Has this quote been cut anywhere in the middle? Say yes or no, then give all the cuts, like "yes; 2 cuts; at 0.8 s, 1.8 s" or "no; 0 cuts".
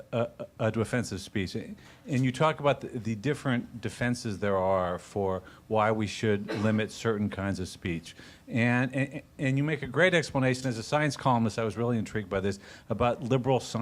yes; 1 cut; at 9.7 s